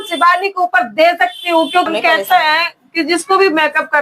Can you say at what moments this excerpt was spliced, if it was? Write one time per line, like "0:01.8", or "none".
0:01.9